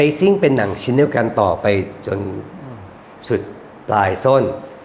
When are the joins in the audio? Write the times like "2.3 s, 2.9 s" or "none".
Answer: none